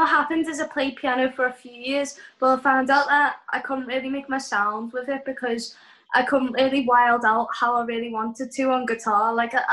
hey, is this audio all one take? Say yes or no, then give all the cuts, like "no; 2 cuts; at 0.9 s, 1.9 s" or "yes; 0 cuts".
yes; 0 cuts